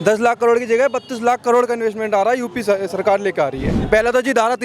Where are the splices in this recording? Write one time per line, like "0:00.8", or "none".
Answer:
0:03.7